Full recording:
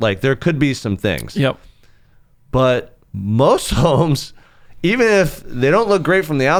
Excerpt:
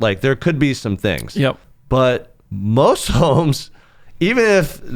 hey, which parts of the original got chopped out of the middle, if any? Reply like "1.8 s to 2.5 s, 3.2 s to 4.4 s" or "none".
1.7 s to 2.3 s